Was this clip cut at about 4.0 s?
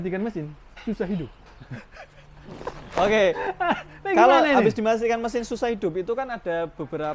no; 0 cuts

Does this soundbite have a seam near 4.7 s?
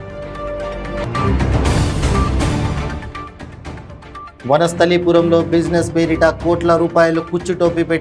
no; 1 cut; at 0.9 s

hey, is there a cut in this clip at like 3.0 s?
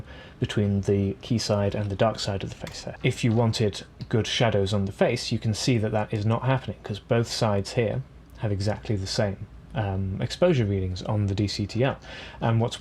yes; 1 cut; at 3.0 s

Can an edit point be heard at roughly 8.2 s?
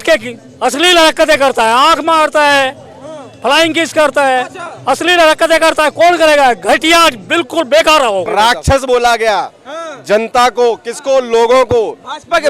yes; 1 cut; at 8.2 s

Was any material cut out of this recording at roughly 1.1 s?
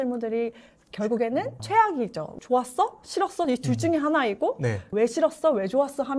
no; 2 cuts; at 2.4 s, 4.9 s

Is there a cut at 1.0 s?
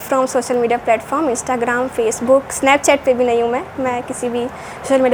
no; 0 cuts

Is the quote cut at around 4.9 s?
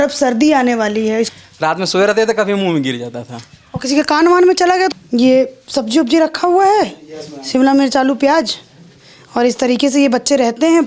yes; 2 cuts; at 1.3 s, 4.9 s

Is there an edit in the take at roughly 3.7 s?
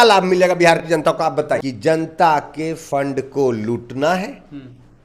no; 1 cut; at 1.6 s

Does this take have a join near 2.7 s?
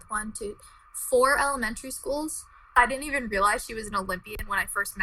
yes; 1 cut; at 2.7 s

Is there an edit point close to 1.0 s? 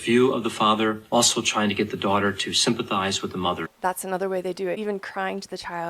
yes; 2 cuts; at 1.0 s, 4.8 s

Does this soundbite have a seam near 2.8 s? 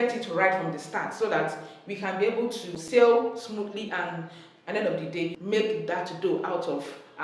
yes; 2 cuts; at 2.8 s, 5.4 s

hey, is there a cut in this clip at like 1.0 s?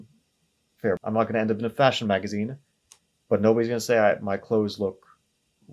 yes; 1 cut; at 1.0 s

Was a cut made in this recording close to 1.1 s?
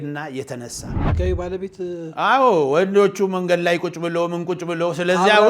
yes; 1 cut; at 1.1 s

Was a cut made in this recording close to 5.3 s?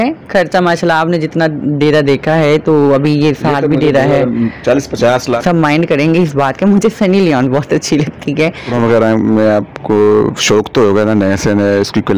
yes; 2 cuts; at 5.3 s, 8.6 s

